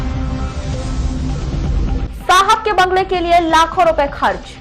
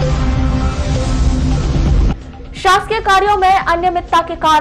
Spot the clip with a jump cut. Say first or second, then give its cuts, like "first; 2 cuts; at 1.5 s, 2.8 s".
first; 1 cut; at 1.8 s